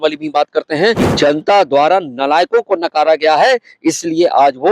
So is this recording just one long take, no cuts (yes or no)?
no